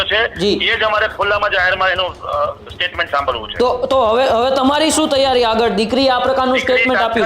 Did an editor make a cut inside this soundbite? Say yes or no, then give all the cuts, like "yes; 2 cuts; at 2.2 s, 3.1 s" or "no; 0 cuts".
no; 0 cuts